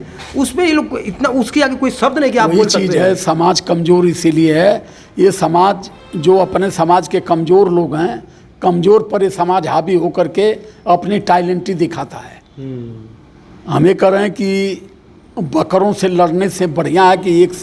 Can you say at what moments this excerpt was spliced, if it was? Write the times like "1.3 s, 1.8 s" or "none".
none